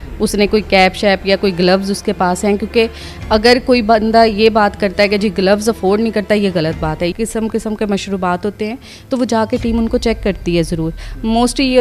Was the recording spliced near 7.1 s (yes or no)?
yes